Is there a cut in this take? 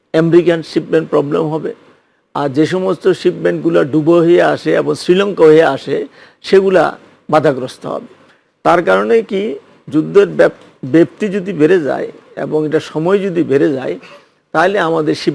no; 0 cuts

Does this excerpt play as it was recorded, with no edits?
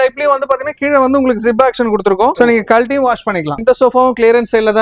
no; 2 cuts; at 2.3 s, 3.6 s

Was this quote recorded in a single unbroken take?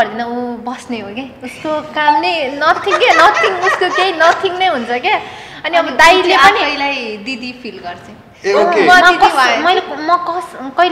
yes; 0 cuts

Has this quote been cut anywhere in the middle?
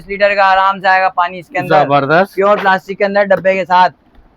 no; 0 cuts

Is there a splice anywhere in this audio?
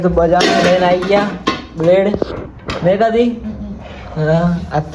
no; 0 cuts

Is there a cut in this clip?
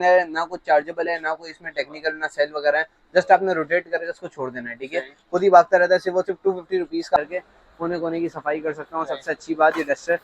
yes; 1 cut; at 7.2 s

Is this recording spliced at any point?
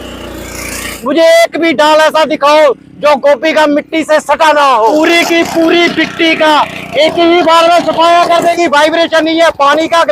yes; 3 cuts; at 0.9 s, 4.9 s, 8.5 s

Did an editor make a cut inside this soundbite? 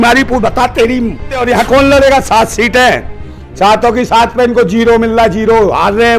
yes; 1 cut; at 1.4 s

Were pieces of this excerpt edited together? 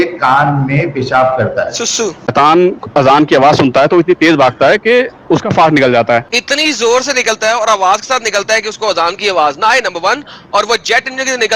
yes; 2 cuts; at 2.3 s, 6.4 s

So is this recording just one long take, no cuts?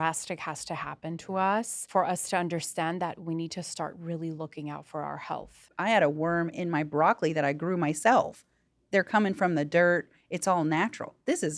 no; 2 cuts; at 1.8 s, 5.6 s

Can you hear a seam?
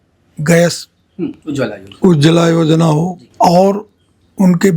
yes; 1 cut; at 3.2 s

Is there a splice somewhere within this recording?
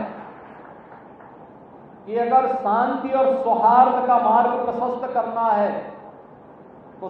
no; 0 cuts

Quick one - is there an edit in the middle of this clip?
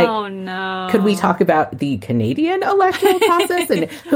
no; 0 cuts

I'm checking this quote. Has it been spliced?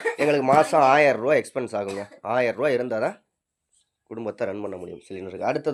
no; 0 cuts

